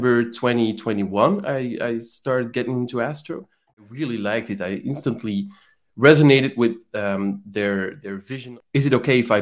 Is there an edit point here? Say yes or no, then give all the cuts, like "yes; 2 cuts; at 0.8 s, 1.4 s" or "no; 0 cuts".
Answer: yes; 2 cuts; at 3.9 s, 8.3 s